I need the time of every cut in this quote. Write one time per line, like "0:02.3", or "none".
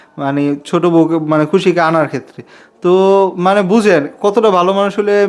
none

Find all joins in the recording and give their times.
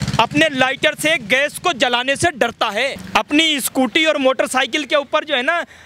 0:03.0

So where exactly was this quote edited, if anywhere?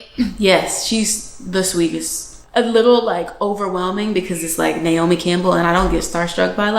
0:02.3

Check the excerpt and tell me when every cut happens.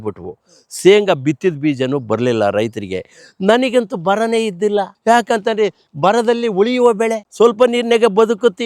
none

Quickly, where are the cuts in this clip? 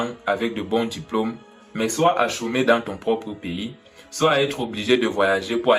none

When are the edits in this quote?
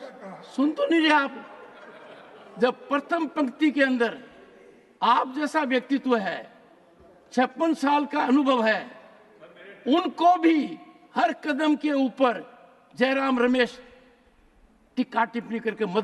none

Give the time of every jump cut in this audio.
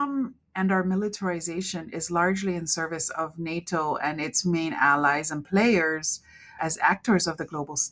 none

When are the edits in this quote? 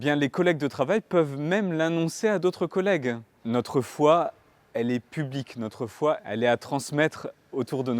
0:03.3
0:06.2

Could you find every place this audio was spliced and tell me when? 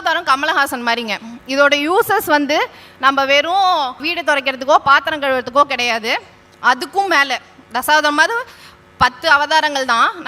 0:04.1

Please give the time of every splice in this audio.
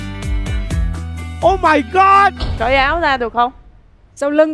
0:02.5

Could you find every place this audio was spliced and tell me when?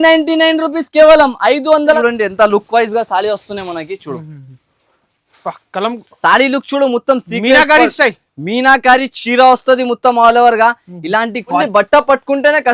0:02.0
0:11.6

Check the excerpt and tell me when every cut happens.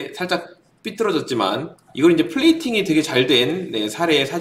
0:01.7

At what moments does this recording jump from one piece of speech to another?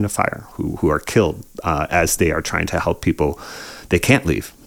none

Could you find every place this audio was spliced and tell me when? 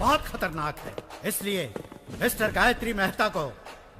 none

